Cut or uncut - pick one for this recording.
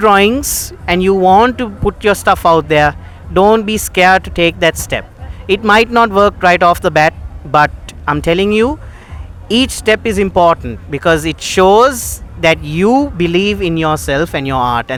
uncut